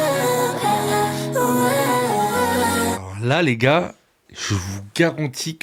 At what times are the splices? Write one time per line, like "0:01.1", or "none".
none